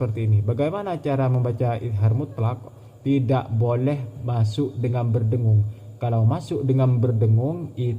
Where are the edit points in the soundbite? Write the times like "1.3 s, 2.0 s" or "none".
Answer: 4.2 s